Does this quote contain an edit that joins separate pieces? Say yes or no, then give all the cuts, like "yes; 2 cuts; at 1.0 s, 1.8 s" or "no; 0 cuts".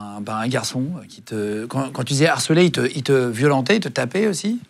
no; 0 cuts